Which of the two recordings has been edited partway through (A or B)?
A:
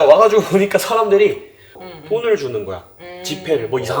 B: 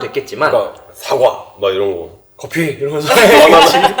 A